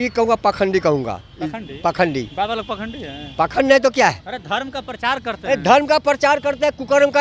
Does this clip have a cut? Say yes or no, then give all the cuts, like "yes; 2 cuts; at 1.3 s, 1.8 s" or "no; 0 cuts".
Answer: no; 0 cuts